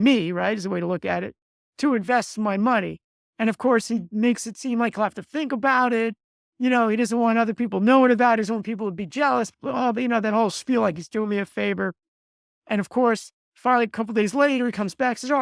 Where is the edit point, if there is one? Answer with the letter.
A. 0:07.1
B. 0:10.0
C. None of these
C